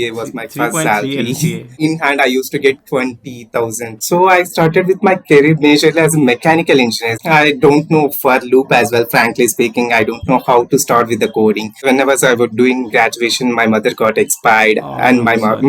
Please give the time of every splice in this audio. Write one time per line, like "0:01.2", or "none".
0:01.7
0:04.0
0:07.1
0:11.8